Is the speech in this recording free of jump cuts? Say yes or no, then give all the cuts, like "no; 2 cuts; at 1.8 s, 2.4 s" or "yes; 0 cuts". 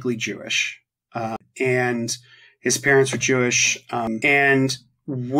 no; 2 cuts; at 1.4 s, 4.1 s